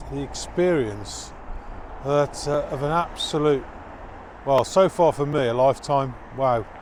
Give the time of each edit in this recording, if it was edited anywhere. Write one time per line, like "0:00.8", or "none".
none